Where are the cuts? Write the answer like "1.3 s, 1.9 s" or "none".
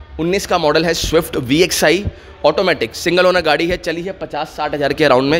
none